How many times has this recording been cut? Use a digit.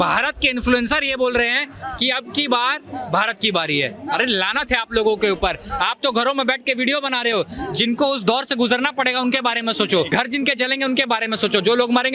1